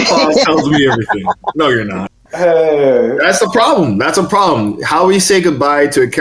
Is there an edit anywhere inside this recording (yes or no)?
yes